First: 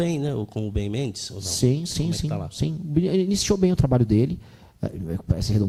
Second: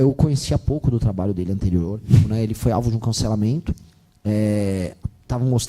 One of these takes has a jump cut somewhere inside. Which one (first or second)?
second